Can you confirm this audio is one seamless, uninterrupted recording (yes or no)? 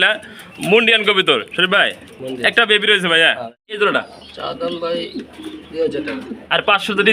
no